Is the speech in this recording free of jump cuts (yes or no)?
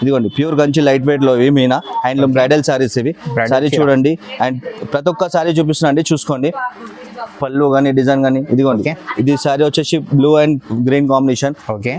yes